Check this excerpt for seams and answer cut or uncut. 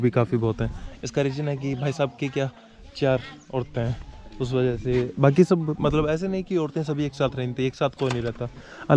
uncut